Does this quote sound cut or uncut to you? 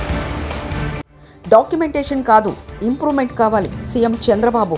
uncut